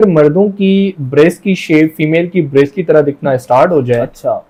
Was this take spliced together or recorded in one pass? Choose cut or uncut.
uncut